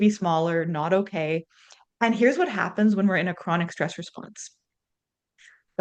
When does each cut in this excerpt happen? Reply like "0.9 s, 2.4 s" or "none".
none